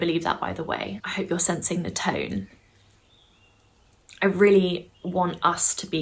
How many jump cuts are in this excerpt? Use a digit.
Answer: 1